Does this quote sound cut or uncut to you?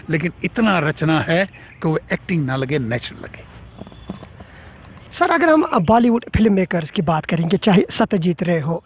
uncut